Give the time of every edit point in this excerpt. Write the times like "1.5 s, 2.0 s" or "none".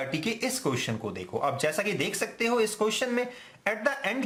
none